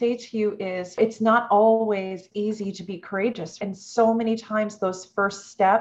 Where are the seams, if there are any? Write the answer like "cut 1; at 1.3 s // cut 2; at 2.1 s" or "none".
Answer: cut 1; at 1.0 s // cut 2; at 3.6 s